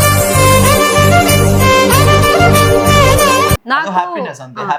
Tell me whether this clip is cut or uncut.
uncut